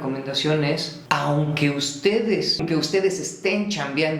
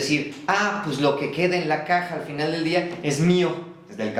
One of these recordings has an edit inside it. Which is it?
first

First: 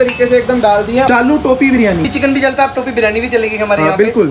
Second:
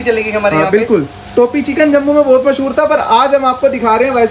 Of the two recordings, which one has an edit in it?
first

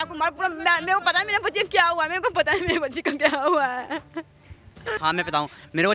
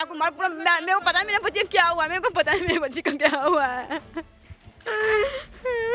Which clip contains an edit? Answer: first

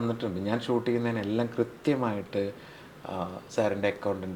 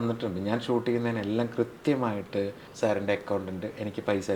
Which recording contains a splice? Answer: second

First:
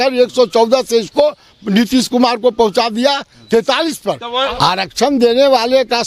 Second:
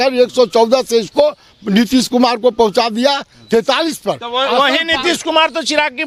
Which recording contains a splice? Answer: first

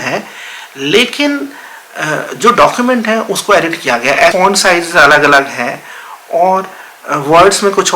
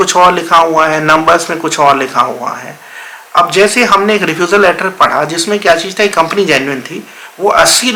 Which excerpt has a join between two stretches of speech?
first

